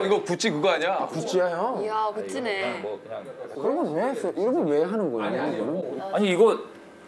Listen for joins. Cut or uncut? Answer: cut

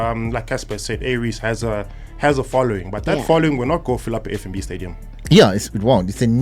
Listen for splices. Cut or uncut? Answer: uncut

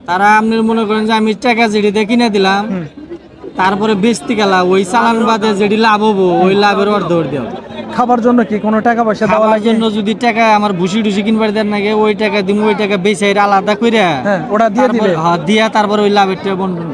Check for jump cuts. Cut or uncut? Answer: uncut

